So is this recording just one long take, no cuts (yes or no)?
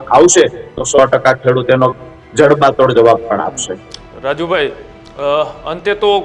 yes